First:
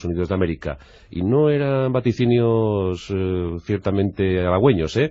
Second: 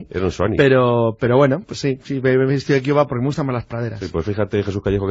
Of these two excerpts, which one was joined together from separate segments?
first; 1 cut; at 1.8 s

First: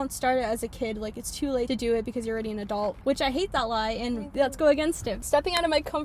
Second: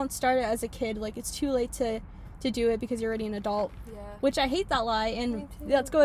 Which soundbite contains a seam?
first; 4 cuts; at 1.7 s, 3.0 s, 4.3 s, 5.2 s

